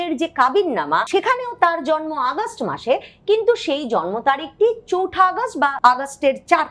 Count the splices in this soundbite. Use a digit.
2